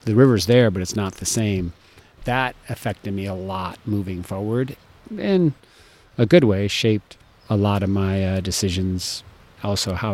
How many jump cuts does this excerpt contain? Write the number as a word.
one